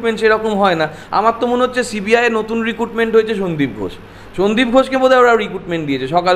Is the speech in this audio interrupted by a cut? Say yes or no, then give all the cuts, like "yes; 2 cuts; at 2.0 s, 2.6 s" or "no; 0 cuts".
no; 0 cuts